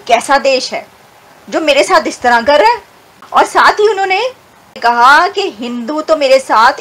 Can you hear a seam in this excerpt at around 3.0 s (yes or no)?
no